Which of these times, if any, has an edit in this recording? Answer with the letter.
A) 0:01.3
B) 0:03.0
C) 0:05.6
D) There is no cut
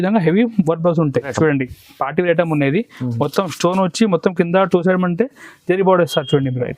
A